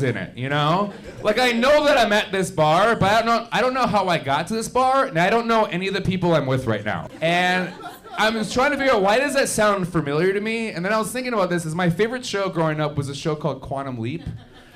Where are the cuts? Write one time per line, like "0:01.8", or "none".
0:07.0